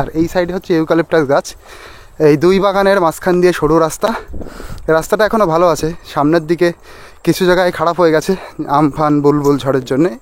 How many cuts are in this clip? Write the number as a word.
zero